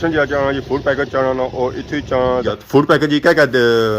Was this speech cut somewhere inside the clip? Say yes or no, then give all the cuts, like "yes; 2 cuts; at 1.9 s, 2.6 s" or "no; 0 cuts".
yes; 1 cut; at 2.5 s